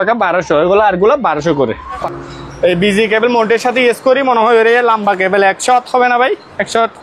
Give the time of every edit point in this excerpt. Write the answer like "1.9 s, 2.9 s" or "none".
2.0 s